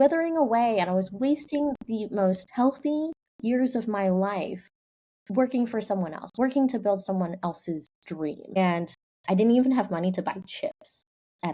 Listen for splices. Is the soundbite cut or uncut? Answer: cut